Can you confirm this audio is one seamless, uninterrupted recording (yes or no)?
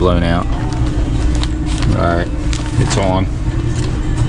no